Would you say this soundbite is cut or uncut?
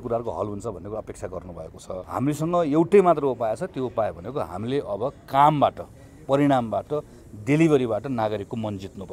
cut